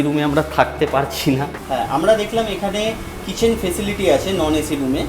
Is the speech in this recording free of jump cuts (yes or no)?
no